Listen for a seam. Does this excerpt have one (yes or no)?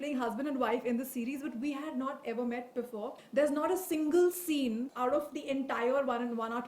yes